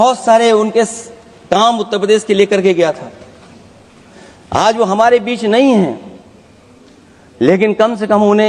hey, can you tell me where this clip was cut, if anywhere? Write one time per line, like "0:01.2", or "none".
none